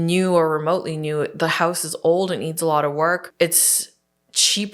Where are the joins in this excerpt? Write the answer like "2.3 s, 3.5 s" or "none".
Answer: 3.3 s